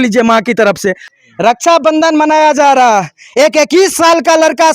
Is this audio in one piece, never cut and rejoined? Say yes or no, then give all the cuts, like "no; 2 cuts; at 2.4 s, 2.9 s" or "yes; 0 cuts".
no; 1 cut; at 1.1 s